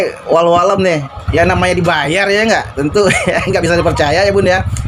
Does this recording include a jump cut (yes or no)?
no